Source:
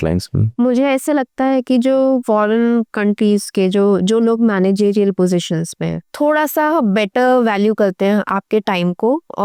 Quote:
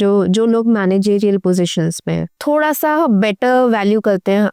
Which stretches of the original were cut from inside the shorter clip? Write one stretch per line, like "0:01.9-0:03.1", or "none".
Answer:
none